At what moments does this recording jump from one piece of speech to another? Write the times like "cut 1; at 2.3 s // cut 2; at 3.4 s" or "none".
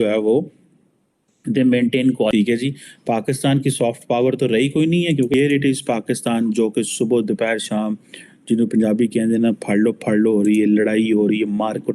cut 1; at 2.3 s // cut 2; at 5.3 s